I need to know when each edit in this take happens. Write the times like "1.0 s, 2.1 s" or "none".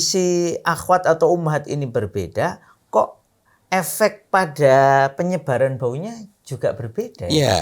none